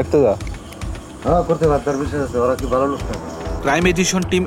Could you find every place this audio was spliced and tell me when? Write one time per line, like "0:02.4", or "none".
none